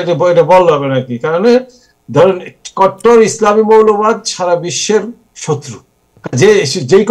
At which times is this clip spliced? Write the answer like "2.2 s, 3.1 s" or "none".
none